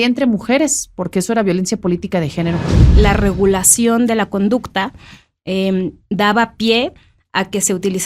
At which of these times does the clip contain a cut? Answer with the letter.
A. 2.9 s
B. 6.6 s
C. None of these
A